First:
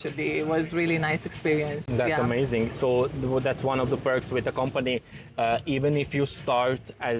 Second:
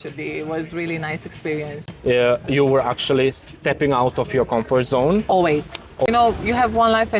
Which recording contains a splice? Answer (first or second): second